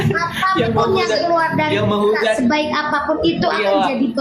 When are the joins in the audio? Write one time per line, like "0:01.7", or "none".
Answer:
none